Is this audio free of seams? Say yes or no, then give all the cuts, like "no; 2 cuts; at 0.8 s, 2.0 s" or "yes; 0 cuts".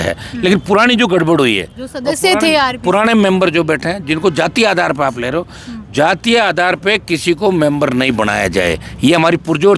yes; 0 cuts